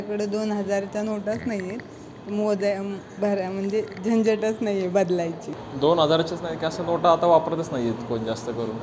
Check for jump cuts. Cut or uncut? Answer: uncut